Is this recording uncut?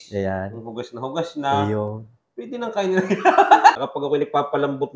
no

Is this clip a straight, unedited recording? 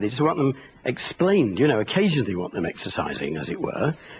yes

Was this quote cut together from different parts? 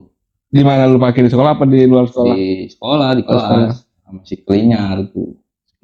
no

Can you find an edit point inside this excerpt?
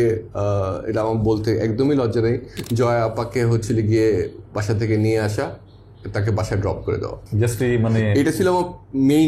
no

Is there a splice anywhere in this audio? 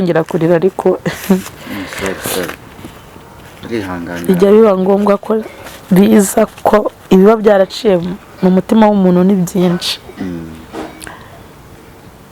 no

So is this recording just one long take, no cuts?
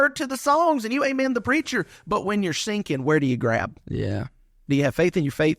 no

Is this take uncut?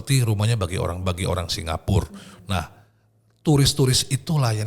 yes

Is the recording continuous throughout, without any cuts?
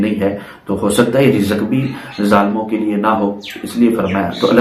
yes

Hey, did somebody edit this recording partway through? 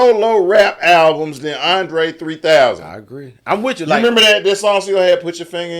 no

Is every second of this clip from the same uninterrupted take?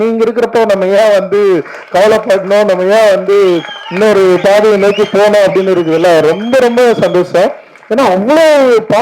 yes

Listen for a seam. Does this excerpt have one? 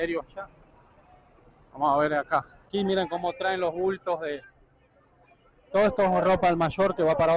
yes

